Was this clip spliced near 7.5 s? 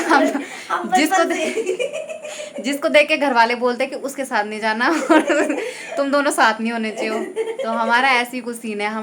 no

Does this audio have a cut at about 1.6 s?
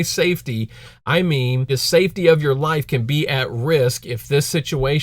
yes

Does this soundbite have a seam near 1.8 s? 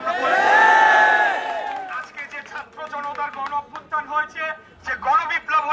no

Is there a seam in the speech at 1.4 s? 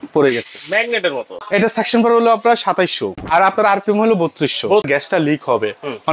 yes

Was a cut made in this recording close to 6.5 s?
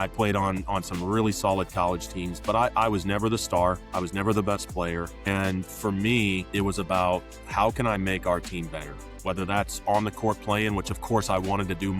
yes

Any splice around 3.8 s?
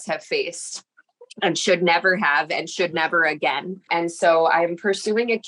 yes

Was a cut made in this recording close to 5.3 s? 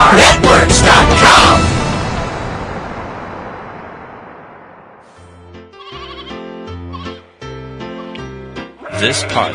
yes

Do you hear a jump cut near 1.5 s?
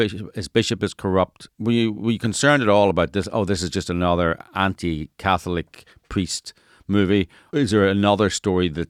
yes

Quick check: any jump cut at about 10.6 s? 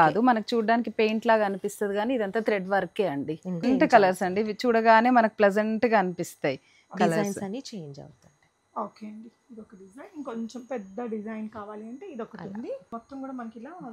no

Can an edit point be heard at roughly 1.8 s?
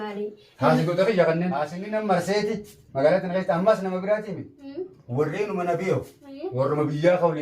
yes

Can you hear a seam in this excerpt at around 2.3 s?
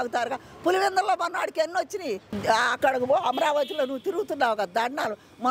yes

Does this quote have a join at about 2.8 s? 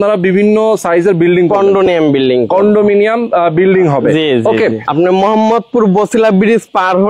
no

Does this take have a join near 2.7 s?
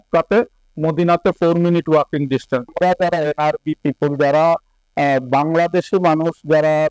yes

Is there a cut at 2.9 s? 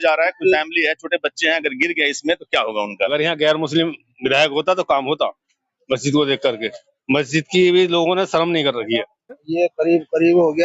yes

